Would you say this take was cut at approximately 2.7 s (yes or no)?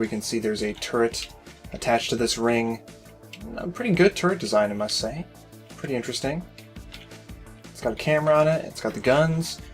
yes